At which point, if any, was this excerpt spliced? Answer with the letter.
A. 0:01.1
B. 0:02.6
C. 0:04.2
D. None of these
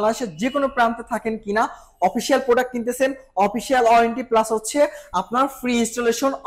D